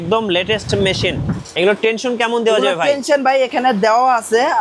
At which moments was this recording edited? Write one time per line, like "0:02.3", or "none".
0:01.5